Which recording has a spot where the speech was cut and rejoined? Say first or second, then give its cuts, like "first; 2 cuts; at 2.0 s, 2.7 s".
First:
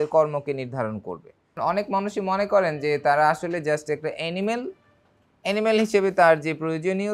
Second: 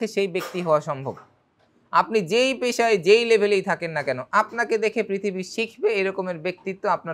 first; 1 cut; at 1.6 s